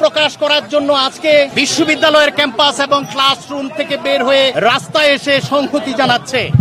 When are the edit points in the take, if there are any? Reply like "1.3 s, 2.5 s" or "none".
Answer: 1.5 s, 4.5 s